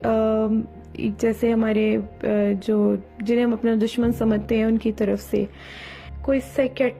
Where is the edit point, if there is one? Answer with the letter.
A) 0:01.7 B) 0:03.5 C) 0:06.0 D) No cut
C